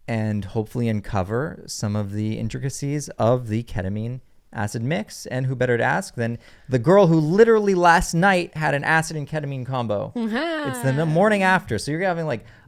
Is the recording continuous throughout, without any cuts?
yes; 0 cuts

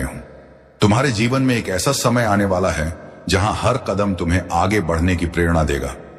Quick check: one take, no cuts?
yes; 0 cuts

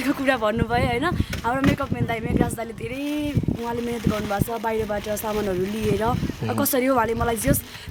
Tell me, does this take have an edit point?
no; 0 cuts

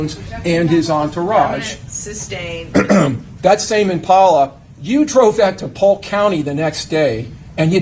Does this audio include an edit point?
yes; 1 cut; at 3.3 s

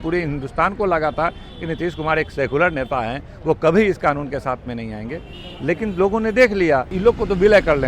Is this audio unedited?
no; 1 cut; at 6.9 s

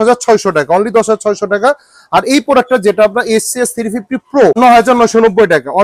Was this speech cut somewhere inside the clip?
yes; 1 cut; at 4.6 s

